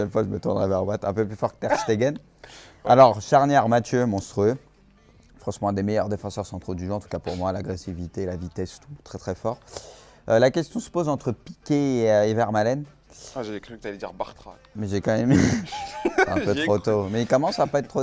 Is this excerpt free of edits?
no; 1 cut; at 4.9 s

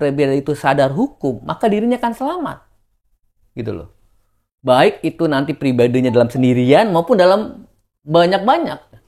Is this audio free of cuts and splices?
yes; 0 cuts

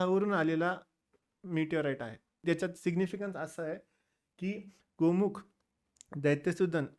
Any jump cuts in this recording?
yes; 1 cut; at 2.4 s

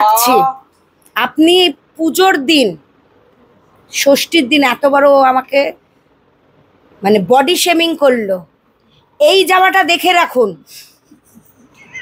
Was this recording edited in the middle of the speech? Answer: no; 0 cuts

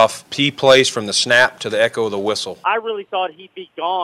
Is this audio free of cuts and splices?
no; 1 cut; at 2.6 s

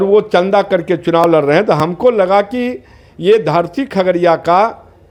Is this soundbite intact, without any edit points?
yes; 0 cuts

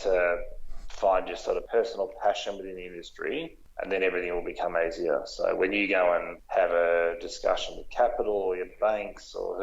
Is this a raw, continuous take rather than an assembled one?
no; 3 cuts; at 1.6 s, 3.6 s, 6.4 s

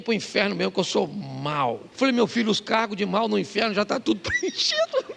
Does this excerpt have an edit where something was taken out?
yes; 1 cut; at 1.9 s

